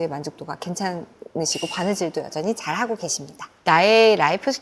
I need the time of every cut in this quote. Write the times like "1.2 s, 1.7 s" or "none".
3.5 s